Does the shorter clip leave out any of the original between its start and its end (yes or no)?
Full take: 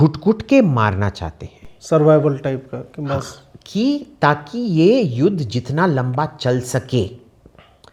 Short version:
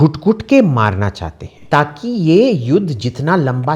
yes